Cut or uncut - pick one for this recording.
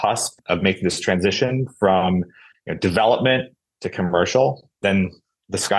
uncut